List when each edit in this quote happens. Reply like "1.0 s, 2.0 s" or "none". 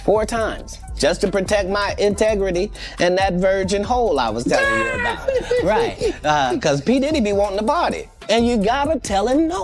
6.0 s

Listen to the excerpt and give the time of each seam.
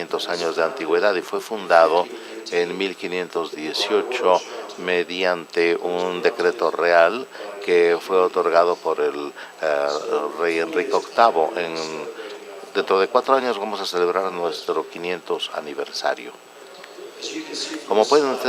5.5 s

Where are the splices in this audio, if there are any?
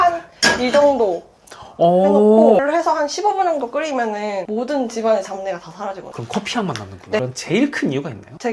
2.6 s, 7.2 s

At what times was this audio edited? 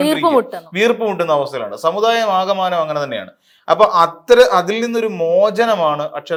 none

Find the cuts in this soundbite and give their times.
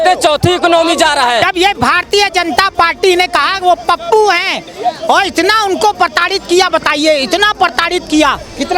1.4 s

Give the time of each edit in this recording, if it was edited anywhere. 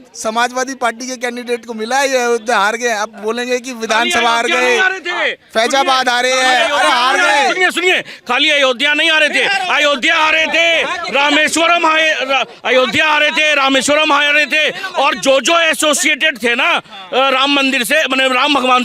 none

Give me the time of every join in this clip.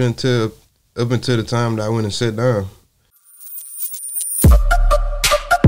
3.1 s

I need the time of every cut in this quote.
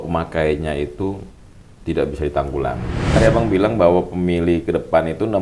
3.2 s

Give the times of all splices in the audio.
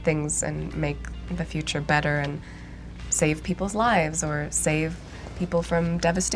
none

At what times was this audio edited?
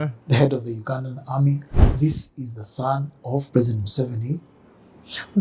1.7 s

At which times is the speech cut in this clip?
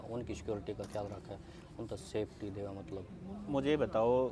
none

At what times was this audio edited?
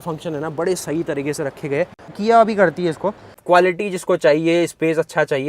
2.1 s, 3.3 s

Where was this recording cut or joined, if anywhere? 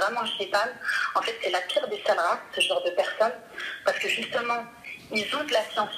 none

